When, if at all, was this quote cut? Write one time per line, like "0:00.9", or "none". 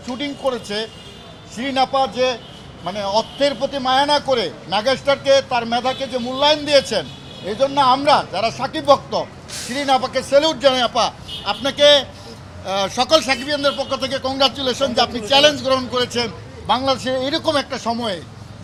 none